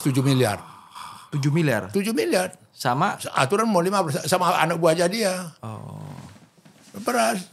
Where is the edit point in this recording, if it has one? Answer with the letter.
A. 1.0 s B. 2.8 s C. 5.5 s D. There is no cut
D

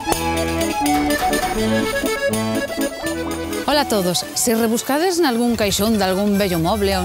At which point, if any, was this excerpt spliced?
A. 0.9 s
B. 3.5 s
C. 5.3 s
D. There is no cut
D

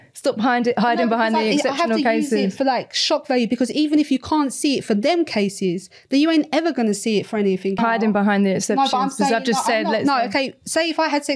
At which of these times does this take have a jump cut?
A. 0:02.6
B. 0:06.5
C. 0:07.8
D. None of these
C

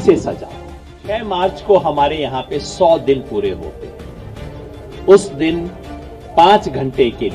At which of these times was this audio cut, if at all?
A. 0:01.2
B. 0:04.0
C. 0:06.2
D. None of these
A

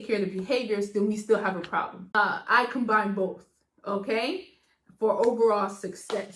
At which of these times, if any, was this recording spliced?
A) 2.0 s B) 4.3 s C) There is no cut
A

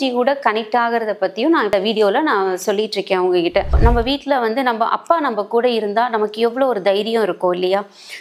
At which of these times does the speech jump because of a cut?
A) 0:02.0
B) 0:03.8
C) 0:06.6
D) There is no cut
B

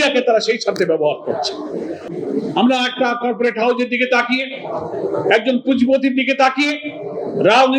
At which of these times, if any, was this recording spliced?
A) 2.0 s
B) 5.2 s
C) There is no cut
A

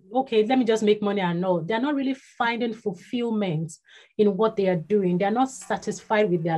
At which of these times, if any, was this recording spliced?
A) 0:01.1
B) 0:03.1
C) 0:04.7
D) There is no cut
D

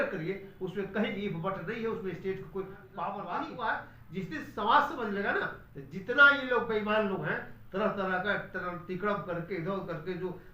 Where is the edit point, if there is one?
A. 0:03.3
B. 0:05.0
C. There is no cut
A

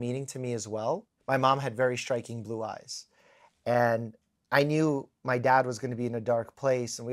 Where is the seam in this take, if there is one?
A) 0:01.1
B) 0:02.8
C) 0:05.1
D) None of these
A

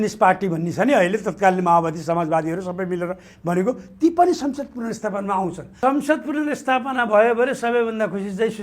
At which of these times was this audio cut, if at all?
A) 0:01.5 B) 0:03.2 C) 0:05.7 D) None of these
C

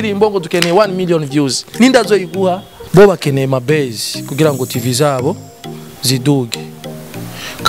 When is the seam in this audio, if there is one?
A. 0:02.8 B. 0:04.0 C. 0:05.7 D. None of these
A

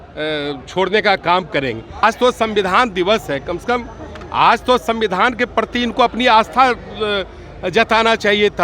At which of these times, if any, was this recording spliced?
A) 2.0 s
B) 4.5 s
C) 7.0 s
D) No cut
A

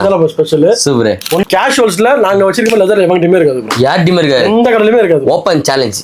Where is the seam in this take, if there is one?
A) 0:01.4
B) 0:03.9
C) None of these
A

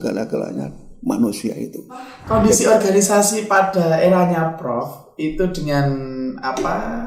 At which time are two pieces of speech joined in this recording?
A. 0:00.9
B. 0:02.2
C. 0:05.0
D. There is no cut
B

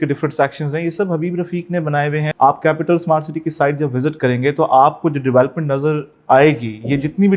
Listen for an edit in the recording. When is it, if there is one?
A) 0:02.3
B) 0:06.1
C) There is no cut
A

